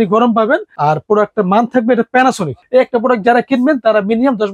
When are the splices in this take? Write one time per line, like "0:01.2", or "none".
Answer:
0:02.6